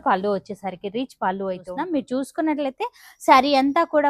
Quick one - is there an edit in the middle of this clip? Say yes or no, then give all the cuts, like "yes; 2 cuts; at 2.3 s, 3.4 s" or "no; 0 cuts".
yes; 1 cut; at 1.7 s